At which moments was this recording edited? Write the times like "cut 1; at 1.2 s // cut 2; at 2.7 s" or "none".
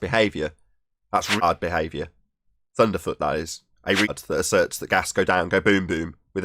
cut 1; at 1.4 s // cut 2; at 4.1 s

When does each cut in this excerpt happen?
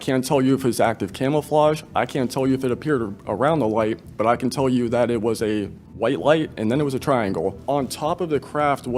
cut 1; at 5.8 s // cut 2; at 7.6 s

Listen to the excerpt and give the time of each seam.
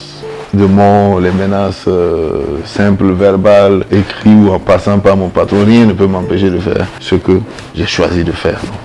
cut 1; at 3.9 s // cut 2; at 7.0 s

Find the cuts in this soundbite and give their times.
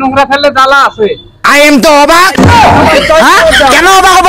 cut 1; at 1.2 s

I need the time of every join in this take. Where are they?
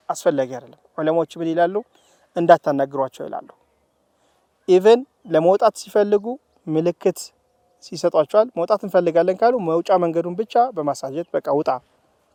none

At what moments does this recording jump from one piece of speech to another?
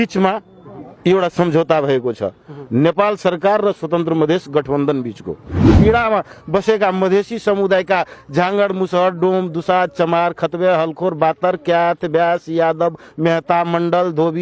cut 1; at 5.7 s

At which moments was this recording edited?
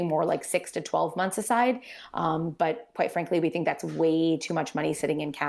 none

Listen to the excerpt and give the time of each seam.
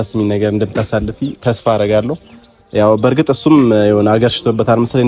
none

